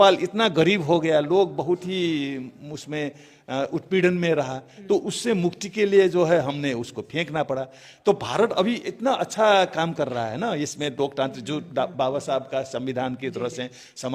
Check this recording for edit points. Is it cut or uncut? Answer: uncut